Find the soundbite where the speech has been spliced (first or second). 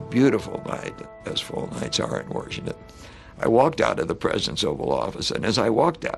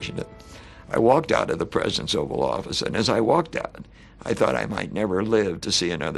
first